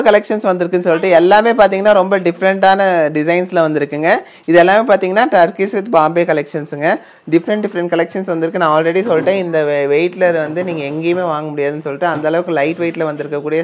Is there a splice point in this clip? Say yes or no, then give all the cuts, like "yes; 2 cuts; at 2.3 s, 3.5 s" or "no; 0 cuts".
no; 0 cuts